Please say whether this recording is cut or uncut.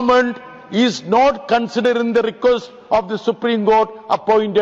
uncut